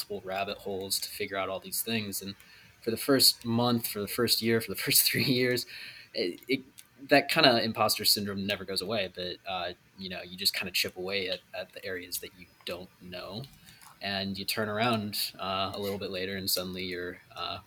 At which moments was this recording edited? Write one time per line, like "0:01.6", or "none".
none